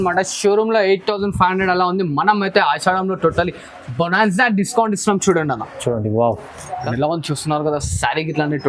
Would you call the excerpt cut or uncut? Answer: cut